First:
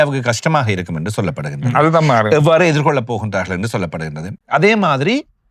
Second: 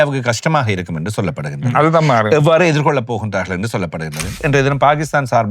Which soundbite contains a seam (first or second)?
second